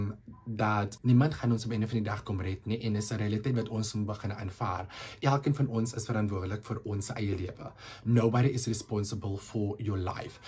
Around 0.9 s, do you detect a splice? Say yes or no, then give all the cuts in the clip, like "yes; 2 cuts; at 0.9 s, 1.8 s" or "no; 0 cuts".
yes; 1 cut; at 0.9 s